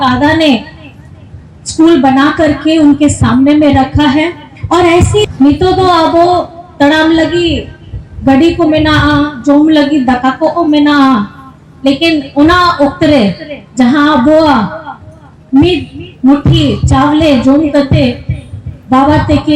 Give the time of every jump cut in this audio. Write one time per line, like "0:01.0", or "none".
0:05.3